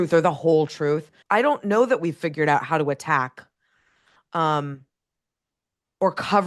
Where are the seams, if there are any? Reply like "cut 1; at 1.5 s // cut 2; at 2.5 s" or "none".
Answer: cut 1; at 1.1 s